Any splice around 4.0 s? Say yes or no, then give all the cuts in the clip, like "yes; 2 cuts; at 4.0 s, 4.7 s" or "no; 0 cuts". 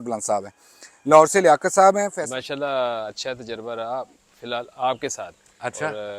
no; 1 cut; at 2.2 s